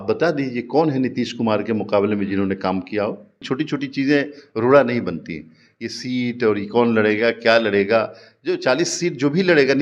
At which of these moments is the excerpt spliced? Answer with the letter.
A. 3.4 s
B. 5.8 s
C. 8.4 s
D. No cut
A